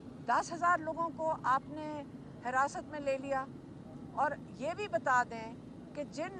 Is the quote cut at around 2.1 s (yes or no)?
no